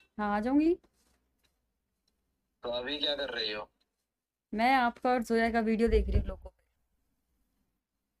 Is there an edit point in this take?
no; 0 cuts

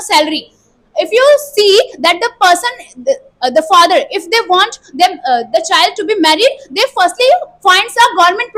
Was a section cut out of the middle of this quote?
no; 0 cuts

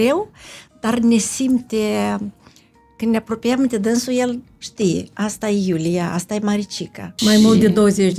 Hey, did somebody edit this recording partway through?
yes; 1 cut; at 7.2 s

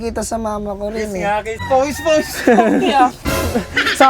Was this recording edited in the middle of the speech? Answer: yes; 1 cut; at 1.5 s

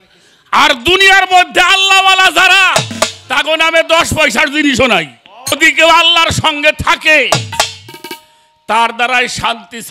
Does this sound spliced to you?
yes; 1 cut; at 5.6 s

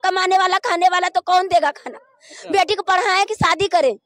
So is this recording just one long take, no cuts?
yes; 0 cuts

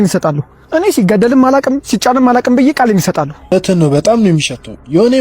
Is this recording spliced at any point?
yes; 1 cut; at 3.5 s

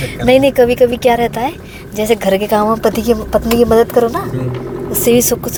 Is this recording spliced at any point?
no; 0 cuts

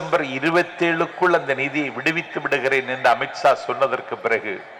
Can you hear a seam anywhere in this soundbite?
no; 0 cuts

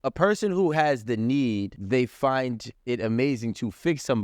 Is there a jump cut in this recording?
yes; 1 cut; at 1.8 s

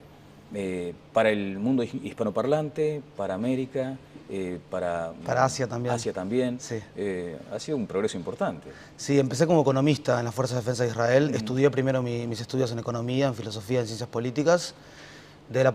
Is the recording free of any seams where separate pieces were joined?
no; 1 cut; at 4.7 s

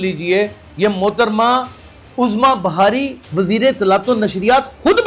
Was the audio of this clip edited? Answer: no; 0 cuts

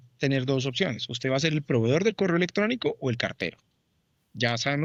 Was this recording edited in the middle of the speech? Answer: no; 0 cuts

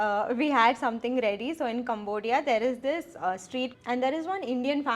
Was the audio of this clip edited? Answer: yes; 1 cut; at 3.7 s

